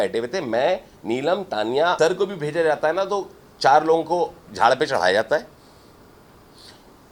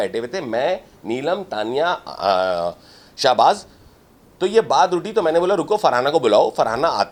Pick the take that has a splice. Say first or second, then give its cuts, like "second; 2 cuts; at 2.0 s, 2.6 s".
first; 1 cut; at 2.0 s